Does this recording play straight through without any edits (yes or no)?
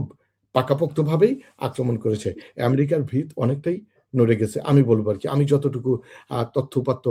yes